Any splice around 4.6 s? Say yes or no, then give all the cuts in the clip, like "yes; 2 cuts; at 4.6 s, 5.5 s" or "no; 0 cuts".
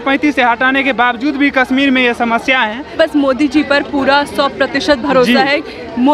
no; 1 cut; at 2.9 s